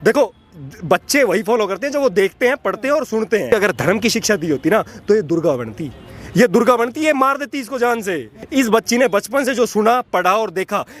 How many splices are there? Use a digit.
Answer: 2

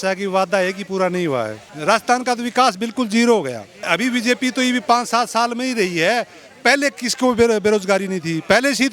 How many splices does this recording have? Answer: 2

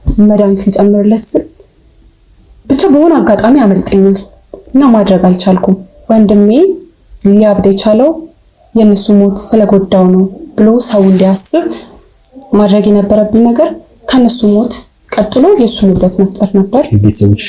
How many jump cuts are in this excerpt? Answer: 1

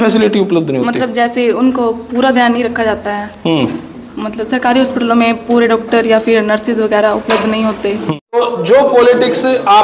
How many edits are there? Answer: 1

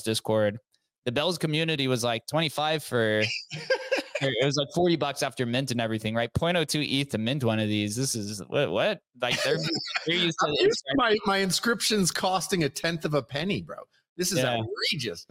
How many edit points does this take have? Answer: 0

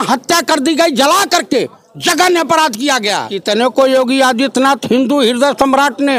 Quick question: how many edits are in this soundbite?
1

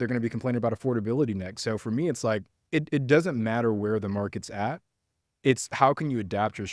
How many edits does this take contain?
1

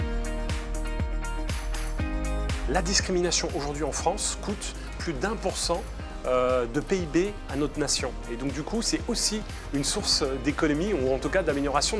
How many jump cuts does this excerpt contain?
1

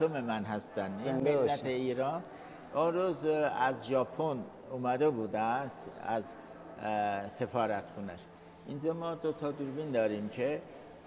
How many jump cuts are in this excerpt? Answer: 0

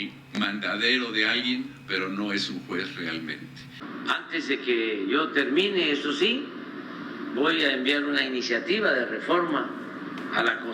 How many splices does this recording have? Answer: 1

